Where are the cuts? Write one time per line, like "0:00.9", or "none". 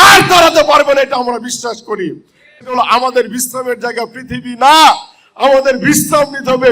0:02.7